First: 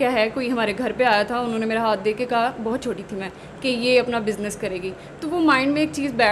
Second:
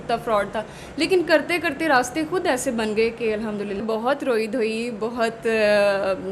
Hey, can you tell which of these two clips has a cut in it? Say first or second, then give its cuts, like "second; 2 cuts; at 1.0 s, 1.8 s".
second; 1 cut; at 3.8 s